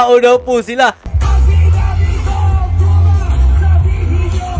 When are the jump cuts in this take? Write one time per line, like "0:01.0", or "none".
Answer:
0:01.1